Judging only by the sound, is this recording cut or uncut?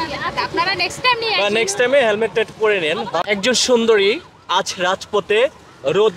cut